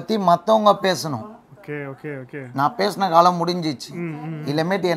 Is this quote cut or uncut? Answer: uncut